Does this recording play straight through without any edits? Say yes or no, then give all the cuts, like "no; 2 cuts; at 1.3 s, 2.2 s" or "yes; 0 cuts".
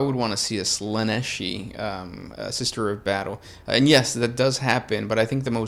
yes; 0 cuts